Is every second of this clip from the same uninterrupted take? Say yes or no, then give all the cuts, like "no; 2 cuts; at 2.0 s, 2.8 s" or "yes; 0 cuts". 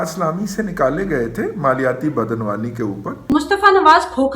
no; 1 cut; at 3.3 s